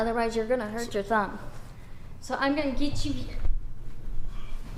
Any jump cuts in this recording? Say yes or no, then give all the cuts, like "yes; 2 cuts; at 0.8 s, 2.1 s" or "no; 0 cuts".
no; 0 cuts